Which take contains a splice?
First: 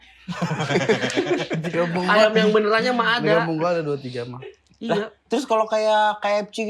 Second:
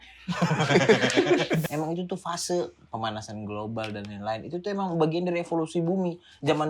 second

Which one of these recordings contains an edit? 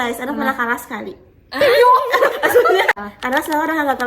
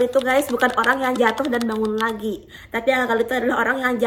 first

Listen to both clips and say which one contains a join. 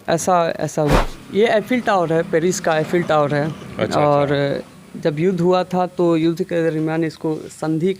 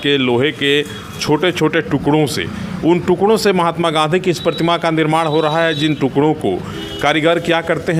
first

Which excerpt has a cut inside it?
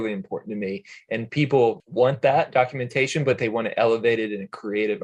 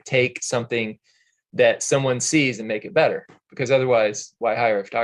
first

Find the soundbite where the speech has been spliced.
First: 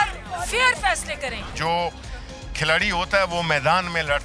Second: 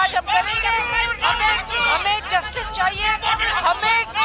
first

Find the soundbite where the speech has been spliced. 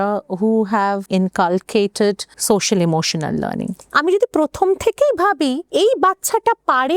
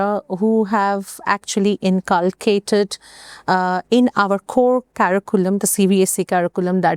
first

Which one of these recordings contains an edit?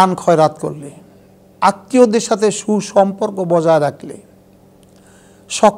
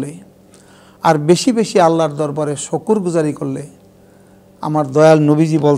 first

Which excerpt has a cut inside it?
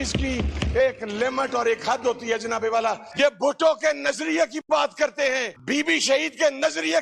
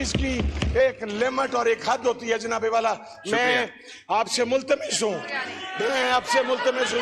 first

